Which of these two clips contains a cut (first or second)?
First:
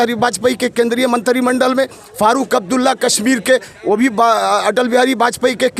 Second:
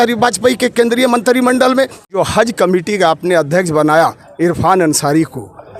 second